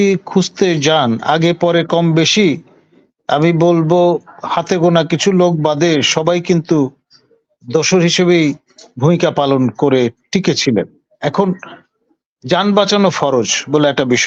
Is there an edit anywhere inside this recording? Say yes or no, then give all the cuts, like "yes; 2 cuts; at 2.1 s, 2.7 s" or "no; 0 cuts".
no; 0 cuts